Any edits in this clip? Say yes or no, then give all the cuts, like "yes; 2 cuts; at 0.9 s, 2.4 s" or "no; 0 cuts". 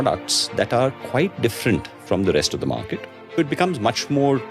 yes; 1 cut; at 3.4 s